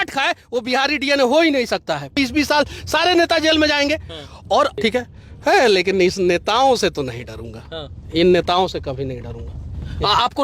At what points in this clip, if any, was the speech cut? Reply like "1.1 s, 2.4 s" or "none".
2.1 s, 4.7 s